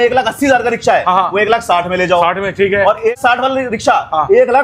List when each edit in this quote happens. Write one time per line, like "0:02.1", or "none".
0:03.1